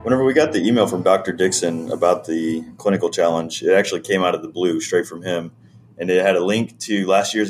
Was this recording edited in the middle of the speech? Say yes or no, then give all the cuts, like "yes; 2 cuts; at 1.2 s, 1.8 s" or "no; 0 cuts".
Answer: no; 0 cuts